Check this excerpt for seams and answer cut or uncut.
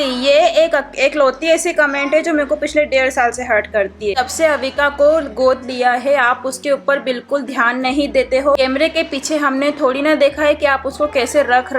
cut